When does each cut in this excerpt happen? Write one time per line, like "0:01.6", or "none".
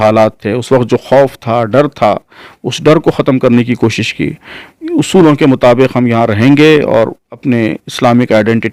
none